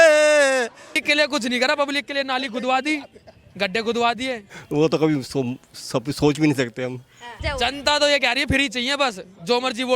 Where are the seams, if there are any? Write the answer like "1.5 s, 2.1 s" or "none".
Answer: 1.0 s, 4.5 s, 7.4 s

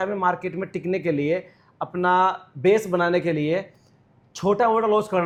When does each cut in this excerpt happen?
none

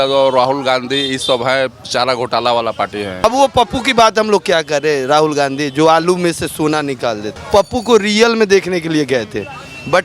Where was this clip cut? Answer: 3.2 s, 7.3 s

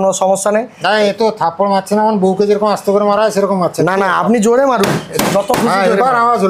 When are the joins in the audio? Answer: none

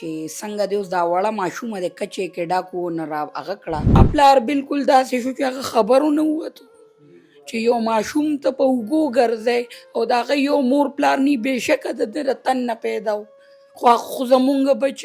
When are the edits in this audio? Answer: 4.0 s

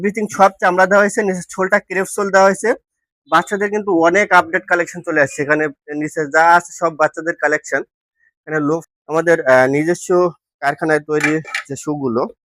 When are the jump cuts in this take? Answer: 8.8 s

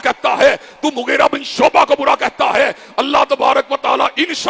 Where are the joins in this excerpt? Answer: none

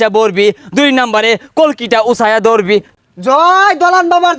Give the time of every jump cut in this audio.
2.9 s

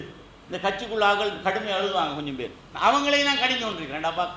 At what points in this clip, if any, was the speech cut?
none

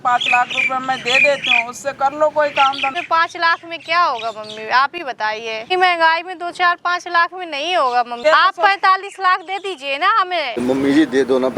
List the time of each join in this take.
2.9 s, 5.7 s, 8.1 s, 10.6 s

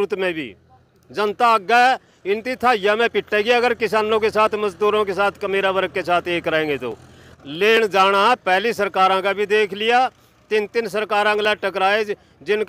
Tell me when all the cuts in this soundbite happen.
7.3 s

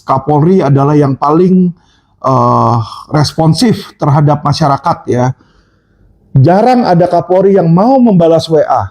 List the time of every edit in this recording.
none

